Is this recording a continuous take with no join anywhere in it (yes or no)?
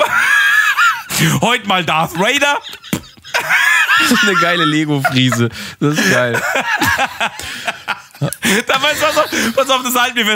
yes